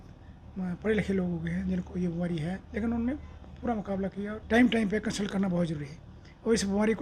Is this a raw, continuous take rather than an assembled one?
no; 2 cuts; at 2.6 s, 4.4 s

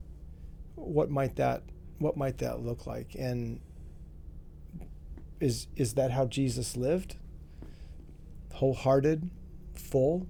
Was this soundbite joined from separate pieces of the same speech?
no; 0 cuts

